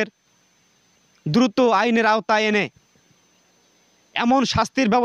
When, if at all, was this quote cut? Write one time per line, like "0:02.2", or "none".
none